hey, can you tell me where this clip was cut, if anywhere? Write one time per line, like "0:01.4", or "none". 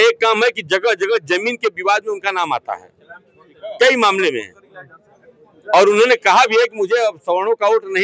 none